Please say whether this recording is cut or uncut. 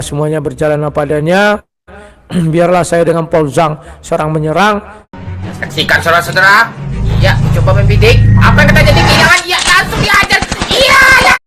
uncut